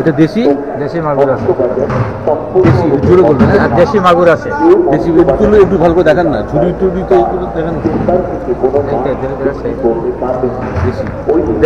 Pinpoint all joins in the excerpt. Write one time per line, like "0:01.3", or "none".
none